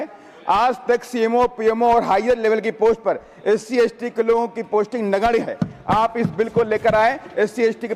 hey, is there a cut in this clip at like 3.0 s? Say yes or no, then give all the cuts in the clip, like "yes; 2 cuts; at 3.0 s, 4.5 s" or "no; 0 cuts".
no; 0 cuts